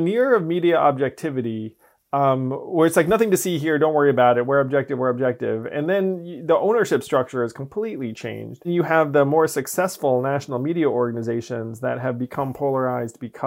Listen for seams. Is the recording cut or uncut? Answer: cut